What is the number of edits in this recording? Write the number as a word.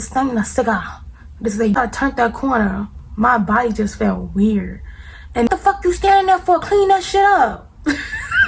two